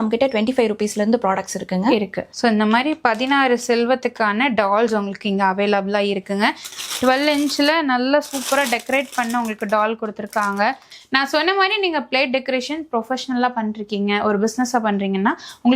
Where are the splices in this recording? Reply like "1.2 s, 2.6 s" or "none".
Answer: 2.2 s, 6.7 s, 10.9 s